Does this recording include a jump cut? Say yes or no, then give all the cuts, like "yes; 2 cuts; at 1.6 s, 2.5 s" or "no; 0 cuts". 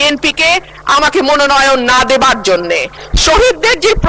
yes; 1 cut; at 3.0 s